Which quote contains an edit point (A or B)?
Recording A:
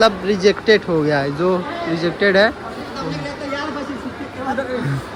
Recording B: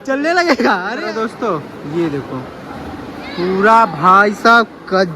B